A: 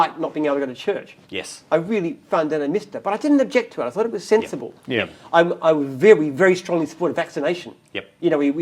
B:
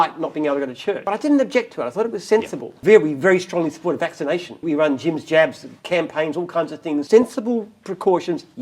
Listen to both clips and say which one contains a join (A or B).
B